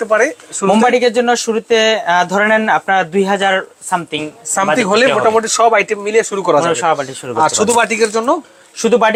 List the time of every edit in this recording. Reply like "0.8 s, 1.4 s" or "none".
none